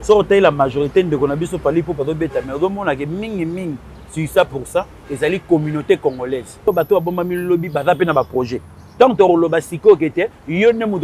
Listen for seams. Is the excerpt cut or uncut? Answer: cut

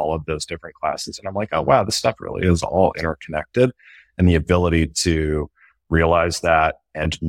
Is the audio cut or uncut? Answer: uncut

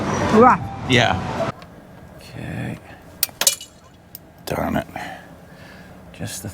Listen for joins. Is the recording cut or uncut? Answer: cut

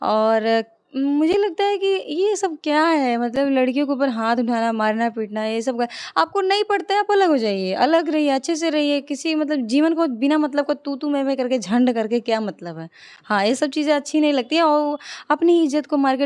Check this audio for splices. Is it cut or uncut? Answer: uncut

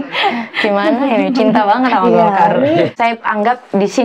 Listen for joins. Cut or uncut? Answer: cut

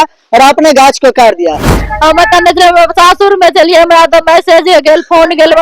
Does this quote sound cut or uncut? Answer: cut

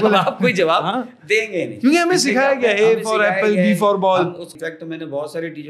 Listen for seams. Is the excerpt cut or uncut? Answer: cut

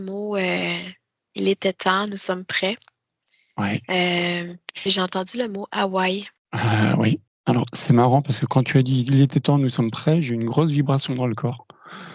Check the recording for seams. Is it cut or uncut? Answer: cut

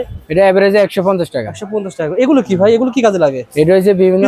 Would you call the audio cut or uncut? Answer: uncut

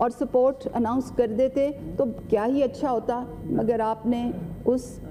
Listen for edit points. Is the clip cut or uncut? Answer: uncut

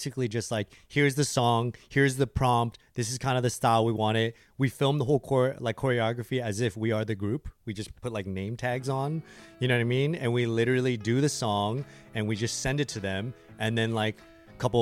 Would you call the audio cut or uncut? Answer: uncut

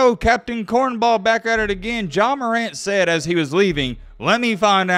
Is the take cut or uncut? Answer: uncut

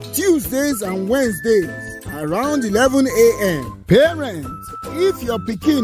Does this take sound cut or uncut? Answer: uncut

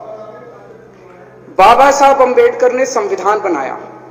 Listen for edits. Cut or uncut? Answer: uncut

